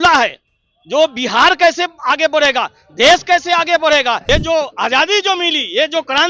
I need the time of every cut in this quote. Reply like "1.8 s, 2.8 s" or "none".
4.2 s